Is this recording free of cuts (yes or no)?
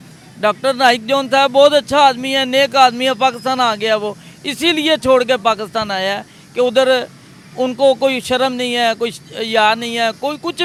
yes